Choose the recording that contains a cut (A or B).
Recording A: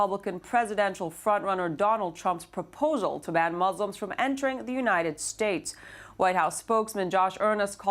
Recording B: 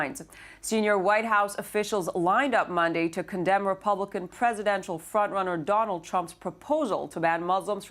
A